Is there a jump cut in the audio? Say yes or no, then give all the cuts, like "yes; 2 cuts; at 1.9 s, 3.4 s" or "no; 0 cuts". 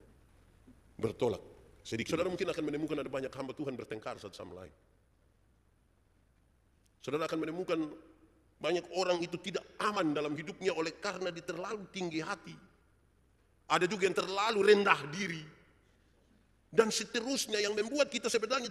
yes; 1 cut; at 2.1 s